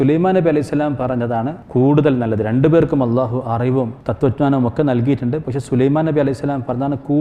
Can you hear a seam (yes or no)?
yes